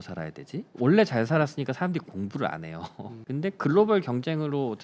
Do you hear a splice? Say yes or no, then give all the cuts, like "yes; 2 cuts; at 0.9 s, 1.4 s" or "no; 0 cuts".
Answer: yes; 1 cut; at 3.1 s